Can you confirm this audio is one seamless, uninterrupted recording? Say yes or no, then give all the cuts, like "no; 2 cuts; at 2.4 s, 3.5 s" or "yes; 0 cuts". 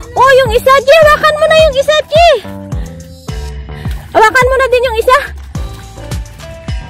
no; 3 cuts; at 2.4 s, 4.0 s, 5.3 s